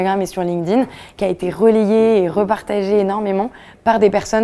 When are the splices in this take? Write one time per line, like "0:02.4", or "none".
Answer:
none